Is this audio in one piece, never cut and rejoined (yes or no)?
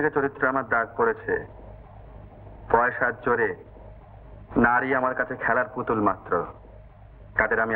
yes